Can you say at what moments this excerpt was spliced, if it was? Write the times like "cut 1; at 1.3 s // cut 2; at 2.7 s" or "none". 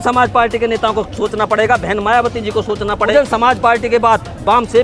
cut 1; at 3.1 s

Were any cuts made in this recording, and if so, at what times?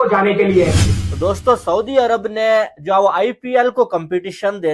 cut 1; at 1.0 s

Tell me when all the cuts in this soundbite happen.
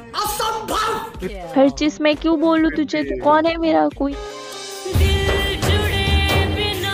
cut 1; at 1.2 s // cut 2; at 4.1 s

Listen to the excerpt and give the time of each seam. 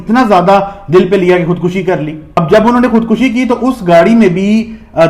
none

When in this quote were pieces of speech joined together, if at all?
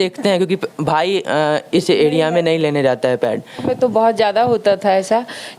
cut 1; at 3.6 s

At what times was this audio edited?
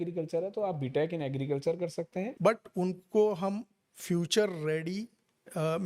cut 1; at 2.3 s

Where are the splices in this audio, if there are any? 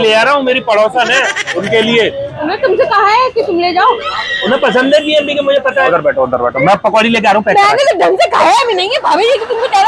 cut 1; at 1.4 s // cut 2; at 2.3 s // cut 3; at 4.2 s // cut 4; at 5.9 s

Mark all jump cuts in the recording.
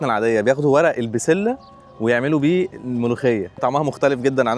none

